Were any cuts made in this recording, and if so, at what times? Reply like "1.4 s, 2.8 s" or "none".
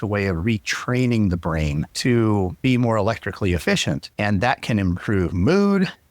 1.9 s, 2.6 s, 4.1 s